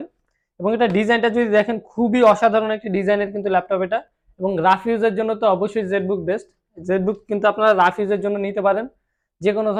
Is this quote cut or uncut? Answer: uncut